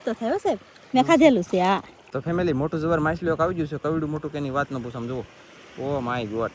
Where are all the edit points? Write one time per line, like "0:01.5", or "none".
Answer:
0:02.0

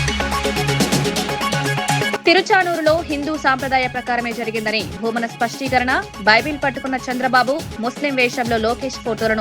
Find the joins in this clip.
0:02.2

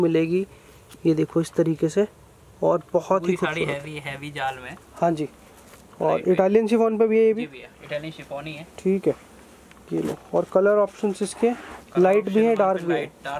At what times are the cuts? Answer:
none

